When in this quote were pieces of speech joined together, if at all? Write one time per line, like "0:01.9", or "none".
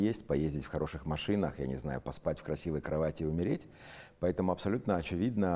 none